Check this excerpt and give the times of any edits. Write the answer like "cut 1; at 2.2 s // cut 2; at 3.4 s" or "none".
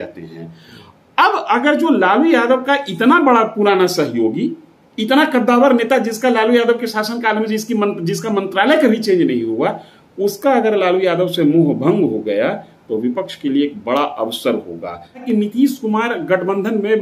cut 1; at 15.2 s